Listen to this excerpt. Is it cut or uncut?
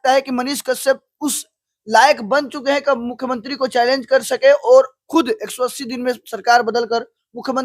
uncut